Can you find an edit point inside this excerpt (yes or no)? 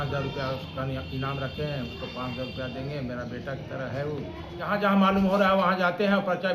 yes